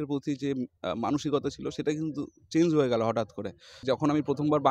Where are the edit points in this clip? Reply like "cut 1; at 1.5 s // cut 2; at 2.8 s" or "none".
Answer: cut 1; at 3.7 s